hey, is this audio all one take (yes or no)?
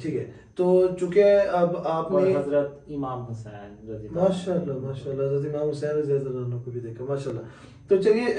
yes